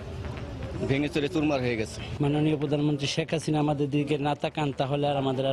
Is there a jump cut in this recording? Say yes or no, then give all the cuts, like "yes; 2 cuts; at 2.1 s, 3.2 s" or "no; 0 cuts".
yes; 1 cut; at 2.1 s